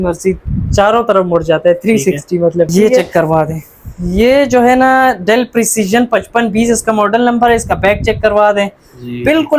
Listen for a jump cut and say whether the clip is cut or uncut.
cut